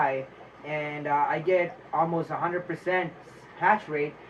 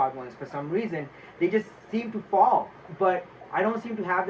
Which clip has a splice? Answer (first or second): second